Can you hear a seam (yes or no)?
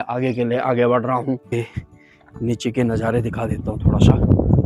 yes